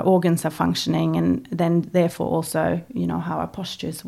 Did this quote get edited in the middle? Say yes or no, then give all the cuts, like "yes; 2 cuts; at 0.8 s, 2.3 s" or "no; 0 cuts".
no; 0 cuts